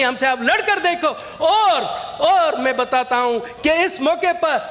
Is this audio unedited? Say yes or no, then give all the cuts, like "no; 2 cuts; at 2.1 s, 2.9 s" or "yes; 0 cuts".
yes; 0 cuts